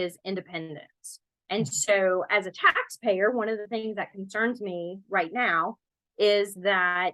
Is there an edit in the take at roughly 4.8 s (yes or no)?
no